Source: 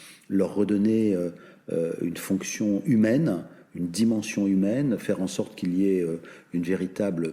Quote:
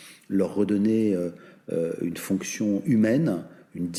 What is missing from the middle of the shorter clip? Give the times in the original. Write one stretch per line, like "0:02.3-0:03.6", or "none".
none

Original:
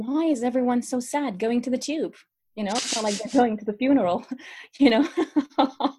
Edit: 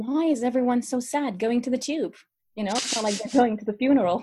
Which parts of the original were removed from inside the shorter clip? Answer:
none

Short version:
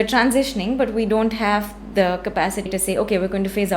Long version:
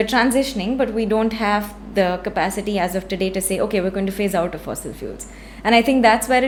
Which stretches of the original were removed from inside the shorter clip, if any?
0:02.7-0:03.3

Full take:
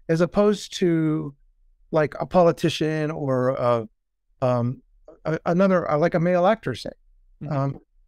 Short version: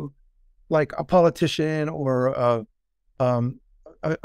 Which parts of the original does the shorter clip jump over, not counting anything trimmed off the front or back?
none

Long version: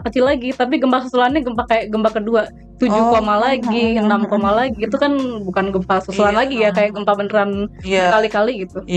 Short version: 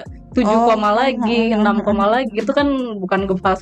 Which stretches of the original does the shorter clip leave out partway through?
none

